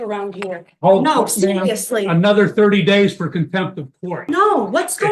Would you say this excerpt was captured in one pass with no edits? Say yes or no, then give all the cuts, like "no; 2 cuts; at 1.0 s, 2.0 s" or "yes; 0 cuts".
no; 1 cut; at 4.1 s